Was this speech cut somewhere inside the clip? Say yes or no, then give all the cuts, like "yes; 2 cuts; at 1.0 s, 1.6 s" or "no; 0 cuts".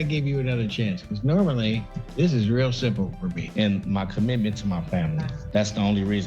yes; 1 cut; at 3.4 s